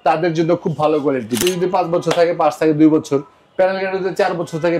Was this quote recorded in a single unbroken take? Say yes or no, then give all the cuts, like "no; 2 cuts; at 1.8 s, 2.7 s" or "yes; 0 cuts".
no; 1 cut; at 1.4 s